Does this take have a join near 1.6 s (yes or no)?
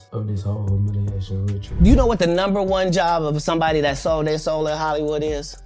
yes